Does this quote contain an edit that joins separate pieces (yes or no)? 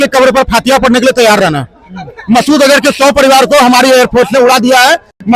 no